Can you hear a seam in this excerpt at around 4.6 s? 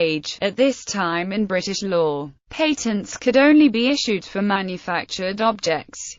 yes; 1 cut; at 4.6 s

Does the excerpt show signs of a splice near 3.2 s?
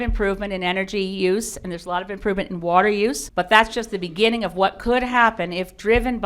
yes; 1 cut; at 3.2 s

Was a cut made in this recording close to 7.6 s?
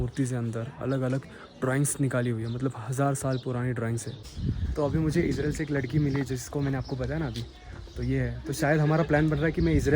no; 1 cut; at 4.1 s

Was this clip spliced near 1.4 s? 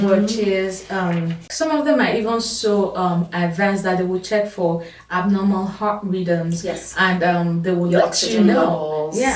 yes; 1 cut; at 1.4 s

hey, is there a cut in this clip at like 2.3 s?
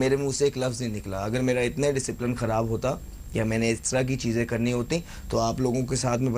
no; 1 cut; at 4.0 s

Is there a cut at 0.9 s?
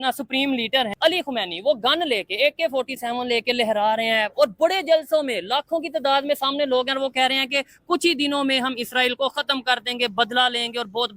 yes; 1 cut; at 0.9 s

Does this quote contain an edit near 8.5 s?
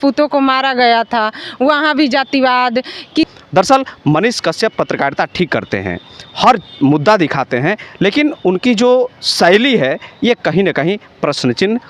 no; 1 cut; at 3.3 s

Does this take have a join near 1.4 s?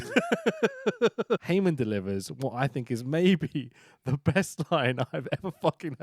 yes; 1 cut; at 1.4 s

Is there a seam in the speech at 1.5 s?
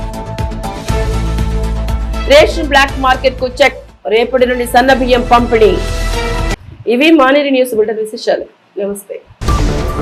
no; 0 cuts

